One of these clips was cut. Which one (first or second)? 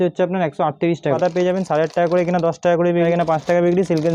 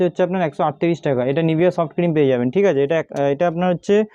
first